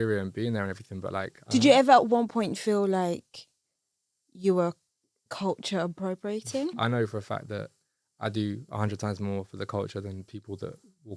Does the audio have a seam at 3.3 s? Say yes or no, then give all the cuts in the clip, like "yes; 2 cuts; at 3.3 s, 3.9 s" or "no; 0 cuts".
no; 2 cuts; at 1.4 s, 6.7 s